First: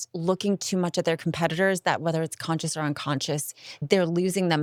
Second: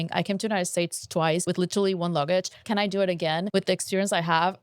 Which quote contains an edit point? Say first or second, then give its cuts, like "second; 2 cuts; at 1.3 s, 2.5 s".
second; 2 cuts; at 1.4 s, 3.5 s